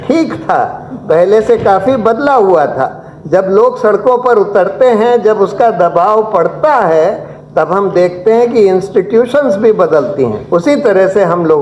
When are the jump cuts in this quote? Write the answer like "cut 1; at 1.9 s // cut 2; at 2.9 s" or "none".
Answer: cut 1; at 10.4 s